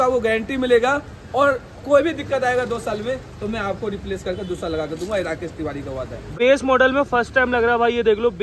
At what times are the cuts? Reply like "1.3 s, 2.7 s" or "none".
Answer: 6.4 s